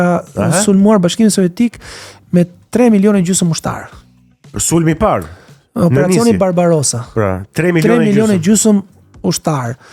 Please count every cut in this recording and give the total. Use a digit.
0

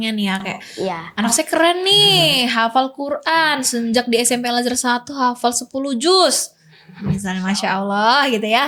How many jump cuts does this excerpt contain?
0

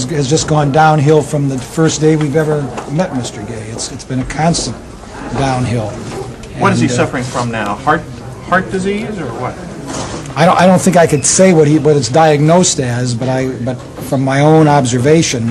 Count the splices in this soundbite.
1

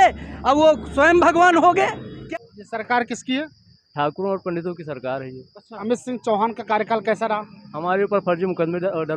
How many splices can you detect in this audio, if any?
2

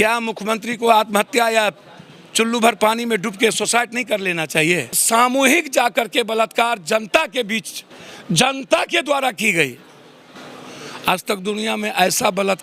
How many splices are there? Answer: 1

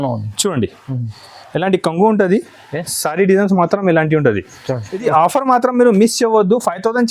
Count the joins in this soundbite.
1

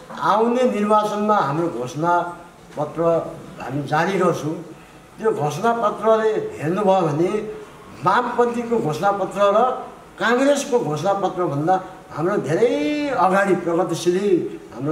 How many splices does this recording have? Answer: 0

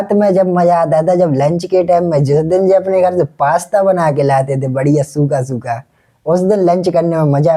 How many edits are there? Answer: 0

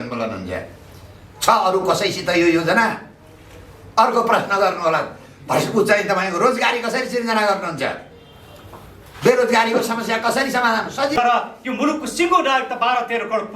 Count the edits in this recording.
1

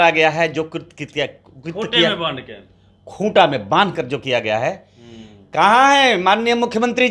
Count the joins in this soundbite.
0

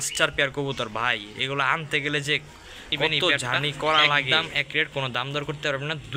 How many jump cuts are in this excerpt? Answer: 1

